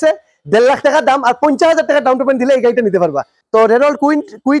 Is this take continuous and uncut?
no; 1 cut; at 3.4 s

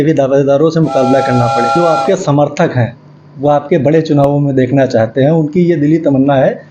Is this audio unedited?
no; 1 cut; at 1.7 s

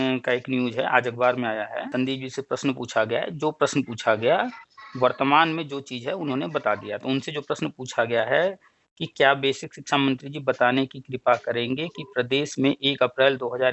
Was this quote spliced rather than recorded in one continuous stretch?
yes; 1 cut; at 1.9 s

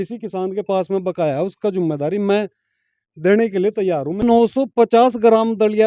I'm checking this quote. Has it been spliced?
yes; 1 cut; at 4.2 s

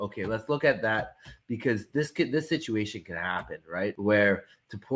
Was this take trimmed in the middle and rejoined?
yes; 1 cut; at 4.0 s

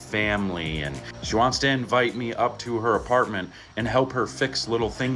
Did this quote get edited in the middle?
yes; 1 cut; at 1.1 s

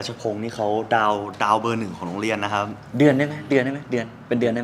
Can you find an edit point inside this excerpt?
no; 0 cuts

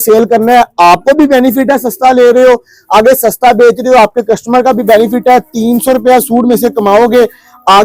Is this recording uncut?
yes; 0 cuts

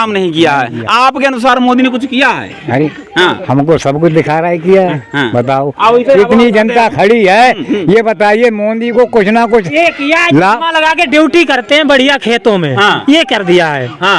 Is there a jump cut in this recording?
no; 0 cuts

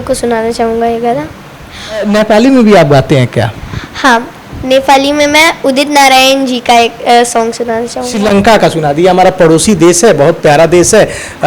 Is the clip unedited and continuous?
no; 2 cuts; at 2.0 s, 8.1 s

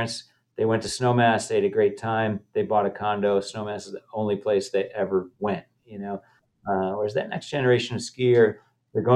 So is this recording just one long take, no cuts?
yes; 0 cuts

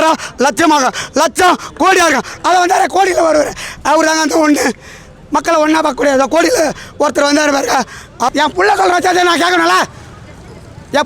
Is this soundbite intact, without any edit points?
no; 1 cut; at 8.3 s

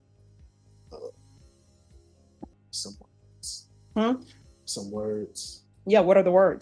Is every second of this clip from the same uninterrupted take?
yes; 0 cuts

